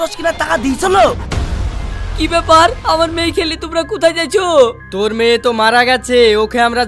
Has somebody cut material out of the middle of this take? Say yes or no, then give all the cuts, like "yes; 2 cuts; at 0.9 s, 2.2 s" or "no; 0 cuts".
yes; 1 cut; at 1.3 s